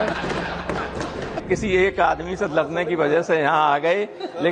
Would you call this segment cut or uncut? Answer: cut